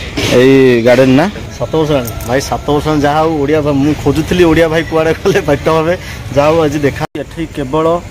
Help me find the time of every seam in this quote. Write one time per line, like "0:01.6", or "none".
0:01.4
0:07.0

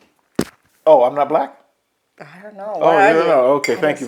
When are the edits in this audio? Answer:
none

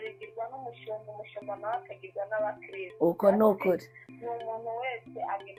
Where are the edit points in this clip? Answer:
none

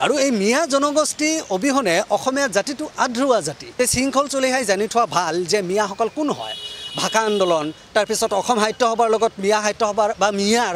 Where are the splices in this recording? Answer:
0:03.6

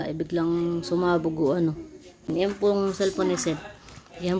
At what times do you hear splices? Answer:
0:02.3

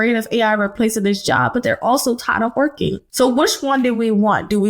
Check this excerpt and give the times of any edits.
0:03.0

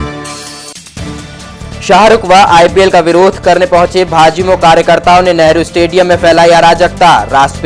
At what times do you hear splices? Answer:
none

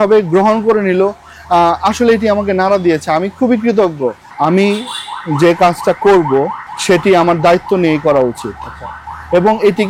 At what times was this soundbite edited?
0:04.3
0:06.7

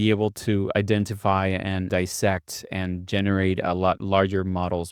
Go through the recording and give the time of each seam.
0:01.9
0:04.0

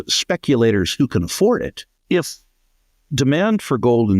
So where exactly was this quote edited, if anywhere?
0:01.9

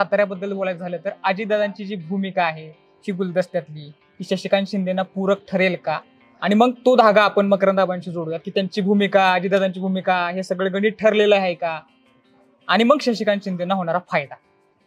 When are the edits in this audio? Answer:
none

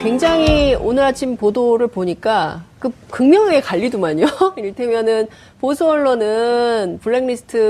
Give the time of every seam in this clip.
none

